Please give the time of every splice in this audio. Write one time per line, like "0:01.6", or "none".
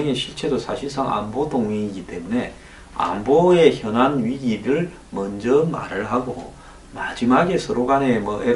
none